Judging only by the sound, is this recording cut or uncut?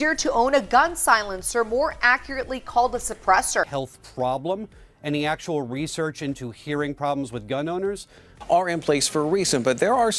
uncut